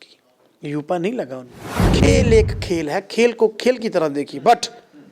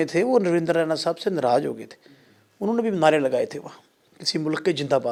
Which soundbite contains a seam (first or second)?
first